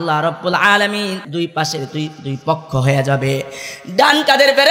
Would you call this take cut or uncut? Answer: cut